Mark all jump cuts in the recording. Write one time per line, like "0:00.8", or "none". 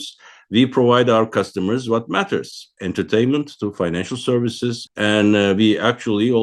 0:04.9